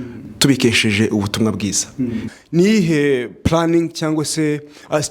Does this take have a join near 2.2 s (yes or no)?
yes